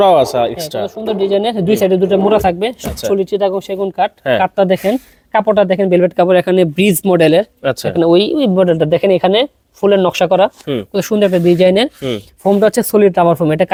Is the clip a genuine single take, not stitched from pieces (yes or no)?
yes